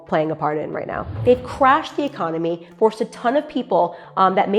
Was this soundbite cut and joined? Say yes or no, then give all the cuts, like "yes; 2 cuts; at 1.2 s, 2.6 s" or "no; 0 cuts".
yes; 1 cut; at 1.1 s